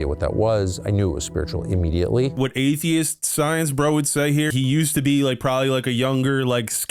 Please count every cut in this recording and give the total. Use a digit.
2